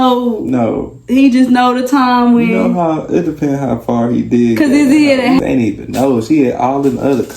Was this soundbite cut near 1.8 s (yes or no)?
no